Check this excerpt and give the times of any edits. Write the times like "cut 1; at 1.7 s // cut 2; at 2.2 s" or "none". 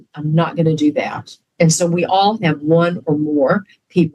none